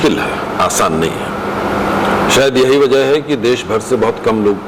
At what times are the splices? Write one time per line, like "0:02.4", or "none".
none